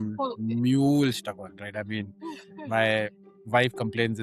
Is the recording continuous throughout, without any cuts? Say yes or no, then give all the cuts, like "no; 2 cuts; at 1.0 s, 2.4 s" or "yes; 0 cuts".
yes; 0 cuts